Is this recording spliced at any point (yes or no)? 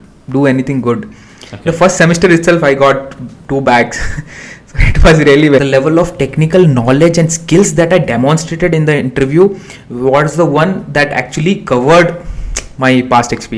yes